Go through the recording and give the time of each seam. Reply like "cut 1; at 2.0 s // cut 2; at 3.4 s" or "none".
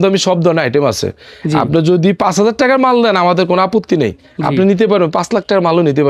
none